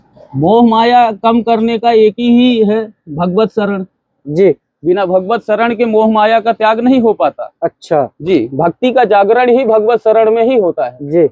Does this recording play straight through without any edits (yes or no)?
yes